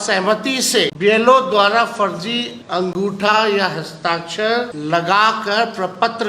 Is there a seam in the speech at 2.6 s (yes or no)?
yes